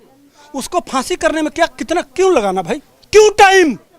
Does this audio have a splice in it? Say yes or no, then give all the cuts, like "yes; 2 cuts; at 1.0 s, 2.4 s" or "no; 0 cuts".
yes; 1 cut; at 2.9 s